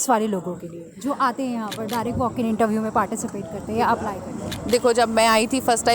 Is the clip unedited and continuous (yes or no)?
yes